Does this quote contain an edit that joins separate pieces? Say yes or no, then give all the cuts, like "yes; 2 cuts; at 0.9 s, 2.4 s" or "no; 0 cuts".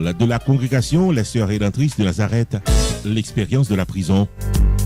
no; 0 cuts